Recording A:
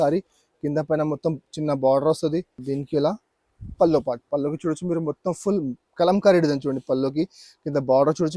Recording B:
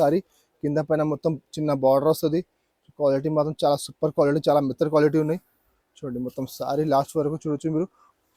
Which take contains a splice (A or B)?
A